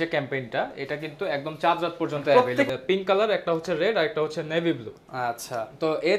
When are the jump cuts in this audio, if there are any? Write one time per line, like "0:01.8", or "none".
0:02.7